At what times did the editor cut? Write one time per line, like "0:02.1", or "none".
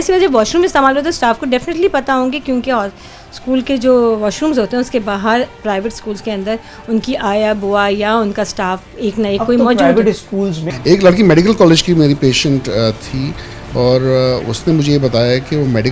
0:10.7